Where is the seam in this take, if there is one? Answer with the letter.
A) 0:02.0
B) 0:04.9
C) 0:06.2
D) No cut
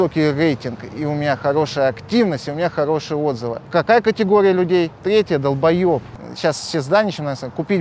C